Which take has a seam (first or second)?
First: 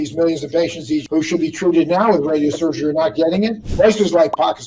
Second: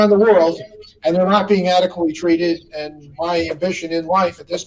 first